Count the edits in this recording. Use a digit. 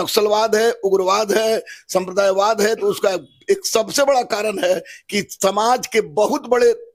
0